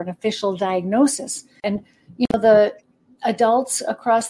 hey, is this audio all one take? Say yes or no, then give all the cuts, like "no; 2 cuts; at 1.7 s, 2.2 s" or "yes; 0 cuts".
no; 1 cut; at 1.8 s